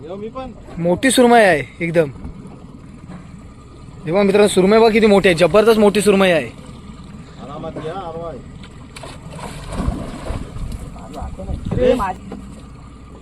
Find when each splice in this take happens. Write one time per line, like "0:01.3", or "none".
0:12.2